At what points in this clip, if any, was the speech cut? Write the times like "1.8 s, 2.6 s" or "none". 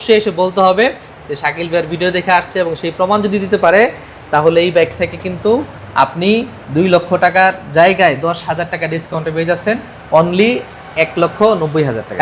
none